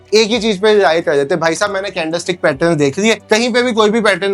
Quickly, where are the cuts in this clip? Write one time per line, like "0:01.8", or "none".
none